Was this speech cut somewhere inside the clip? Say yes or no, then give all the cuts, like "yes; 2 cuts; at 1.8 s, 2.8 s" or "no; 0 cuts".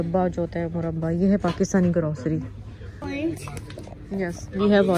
no; 0 cuts